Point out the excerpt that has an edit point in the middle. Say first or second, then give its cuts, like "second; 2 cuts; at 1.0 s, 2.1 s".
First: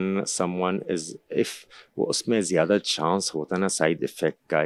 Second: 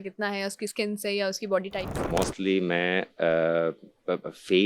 second; 1 cut; at 2.1 s